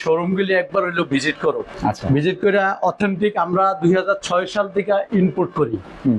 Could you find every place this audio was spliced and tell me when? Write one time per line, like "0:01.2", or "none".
0:01.7